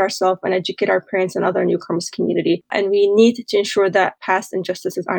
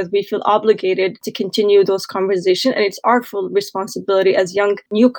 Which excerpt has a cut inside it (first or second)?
first